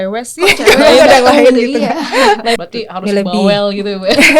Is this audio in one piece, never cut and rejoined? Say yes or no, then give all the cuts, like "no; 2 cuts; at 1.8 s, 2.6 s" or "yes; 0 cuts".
no; 1 cut; at 2.6 s